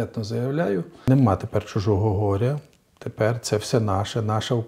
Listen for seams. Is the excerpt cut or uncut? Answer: cut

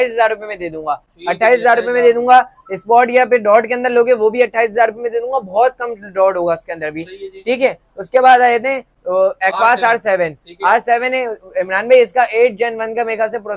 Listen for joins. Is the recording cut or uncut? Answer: uncut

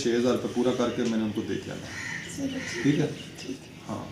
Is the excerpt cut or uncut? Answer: uncut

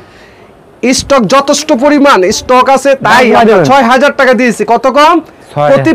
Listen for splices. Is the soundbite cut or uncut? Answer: uncut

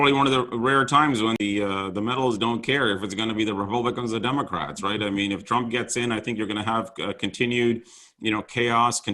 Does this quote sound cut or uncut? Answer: cut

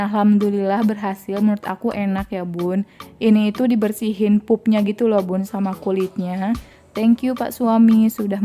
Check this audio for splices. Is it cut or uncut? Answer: cut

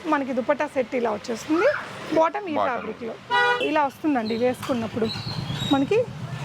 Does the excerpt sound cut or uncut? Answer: cut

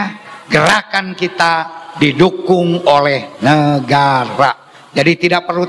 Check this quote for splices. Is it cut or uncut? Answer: uncut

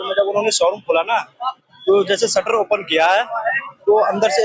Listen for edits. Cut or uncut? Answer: uncut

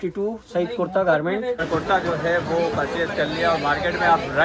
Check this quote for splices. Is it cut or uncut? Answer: cut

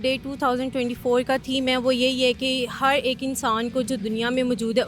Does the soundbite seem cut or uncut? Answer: uncut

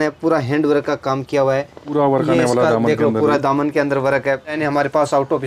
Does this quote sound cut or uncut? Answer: cut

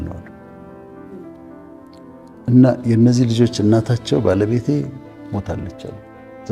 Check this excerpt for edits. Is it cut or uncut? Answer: uncut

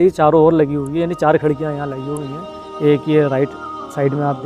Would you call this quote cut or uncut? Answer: uncut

